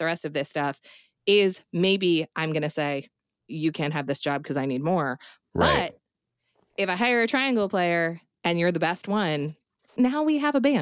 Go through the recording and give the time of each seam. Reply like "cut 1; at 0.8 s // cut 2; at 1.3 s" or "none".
cut 1; at 3.3 s // cut 2; at 9.9 s